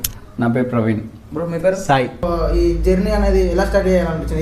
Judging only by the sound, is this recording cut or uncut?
cut